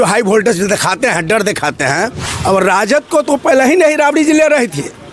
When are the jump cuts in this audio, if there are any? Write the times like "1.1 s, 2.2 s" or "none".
2.3 s